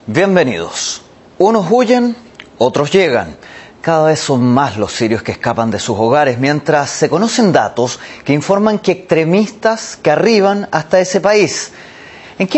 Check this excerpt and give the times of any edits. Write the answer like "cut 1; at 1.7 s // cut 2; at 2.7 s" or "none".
cut 1; at 10.6 s